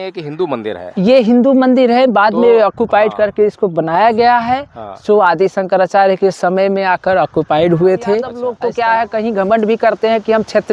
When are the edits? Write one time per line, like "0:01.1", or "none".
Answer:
0:08.4